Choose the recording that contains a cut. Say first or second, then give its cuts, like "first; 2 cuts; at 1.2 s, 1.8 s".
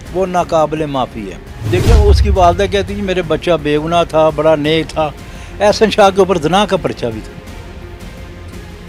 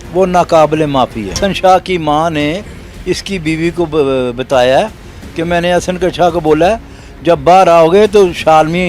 second; 1 cut; at 1.4 s